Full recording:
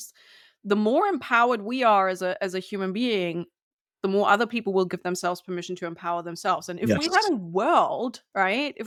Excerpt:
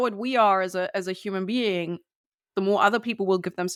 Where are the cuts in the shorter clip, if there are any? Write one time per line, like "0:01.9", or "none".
none